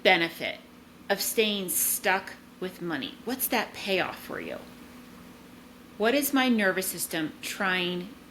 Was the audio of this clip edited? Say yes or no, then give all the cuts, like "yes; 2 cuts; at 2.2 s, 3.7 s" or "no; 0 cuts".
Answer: no; 0 cuts